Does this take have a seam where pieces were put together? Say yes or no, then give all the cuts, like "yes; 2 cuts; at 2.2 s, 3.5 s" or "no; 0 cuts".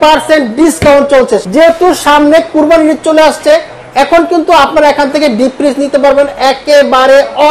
yes; 1 cut; at 1.4 s